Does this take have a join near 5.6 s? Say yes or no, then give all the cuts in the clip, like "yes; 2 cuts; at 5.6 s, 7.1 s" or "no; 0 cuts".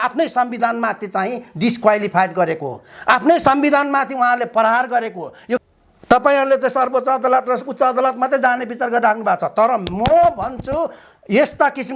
yes; 1 cut; at 5.6 s